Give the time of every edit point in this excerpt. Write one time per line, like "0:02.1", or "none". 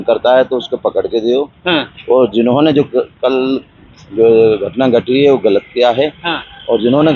none